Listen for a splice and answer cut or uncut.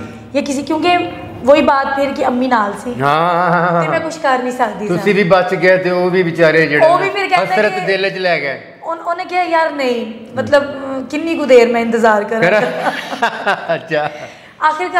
uncut